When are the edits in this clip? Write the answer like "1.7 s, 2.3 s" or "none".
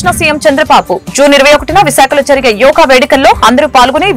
none